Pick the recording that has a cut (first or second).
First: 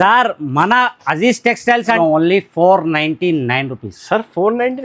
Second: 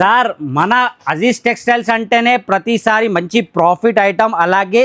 first